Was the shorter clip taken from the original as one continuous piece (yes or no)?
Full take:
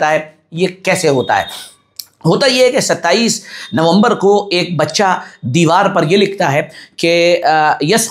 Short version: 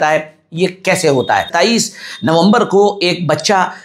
no